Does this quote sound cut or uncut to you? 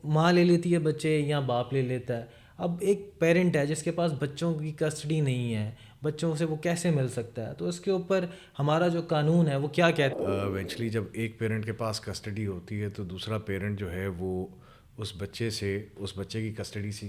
cut